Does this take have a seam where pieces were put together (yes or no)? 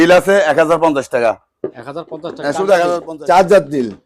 yes